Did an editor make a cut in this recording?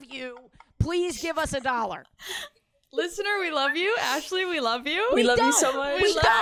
no; 0 cuts

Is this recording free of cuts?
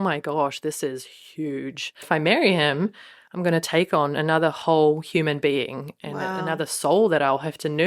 no; 1 cut; at 2.0 s

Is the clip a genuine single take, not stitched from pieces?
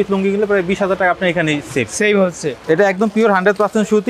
no; 1 cut; at 2.6 s

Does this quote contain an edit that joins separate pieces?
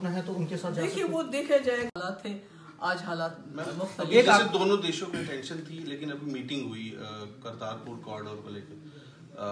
yes; 1 cut; at 1.9 s

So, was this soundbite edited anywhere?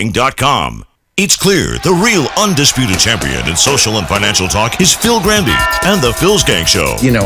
yes; 1 cut; at 0.9 s

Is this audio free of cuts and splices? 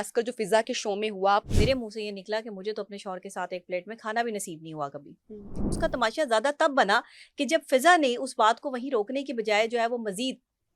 no; 2 cuts; at 1.5 s, 5.7 s

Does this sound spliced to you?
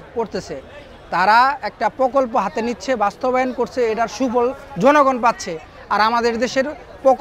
no; 0 cuts

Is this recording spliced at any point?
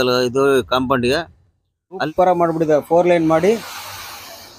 yes; 1 cut; at 2.0 s

